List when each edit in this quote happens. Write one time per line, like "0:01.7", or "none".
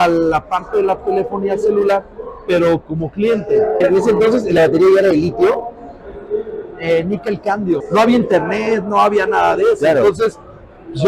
0:03.8
0:07.8